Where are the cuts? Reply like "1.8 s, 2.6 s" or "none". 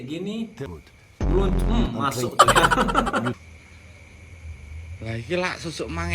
3.4 s